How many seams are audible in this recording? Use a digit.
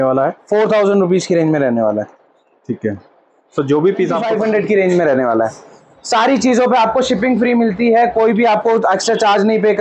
1